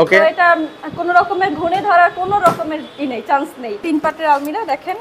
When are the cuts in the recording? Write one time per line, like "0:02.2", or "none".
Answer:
0:03.8